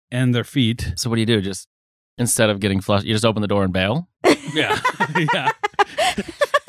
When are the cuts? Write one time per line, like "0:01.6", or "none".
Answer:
none